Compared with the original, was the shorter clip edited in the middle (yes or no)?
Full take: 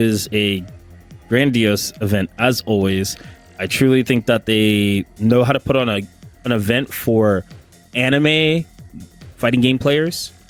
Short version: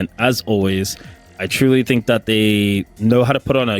no